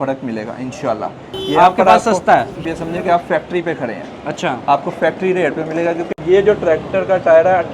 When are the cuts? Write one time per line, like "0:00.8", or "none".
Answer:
0:02.6
0:06.1